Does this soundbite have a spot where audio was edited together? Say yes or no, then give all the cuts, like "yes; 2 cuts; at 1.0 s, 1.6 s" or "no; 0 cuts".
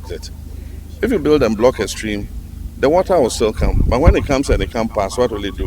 no; 0 cuts